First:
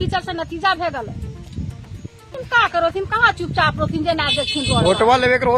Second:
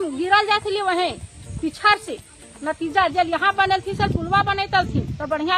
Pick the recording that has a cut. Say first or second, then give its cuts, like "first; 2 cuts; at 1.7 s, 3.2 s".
first; 1 cut; at 2.4 s